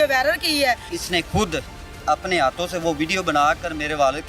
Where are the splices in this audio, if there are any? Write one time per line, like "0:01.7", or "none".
0:01.0